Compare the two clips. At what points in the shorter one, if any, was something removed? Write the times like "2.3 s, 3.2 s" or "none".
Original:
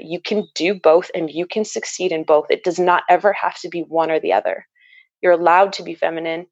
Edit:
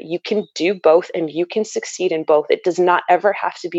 none